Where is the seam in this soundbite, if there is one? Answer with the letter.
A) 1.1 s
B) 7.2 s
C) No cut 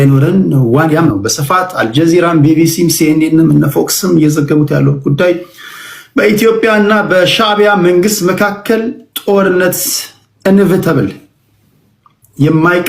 A